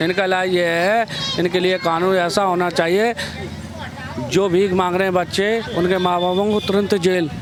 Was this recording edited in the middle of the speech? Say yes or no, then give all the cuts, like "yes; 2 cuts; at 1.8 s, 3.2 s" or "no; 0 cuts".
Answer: no; 0 cuts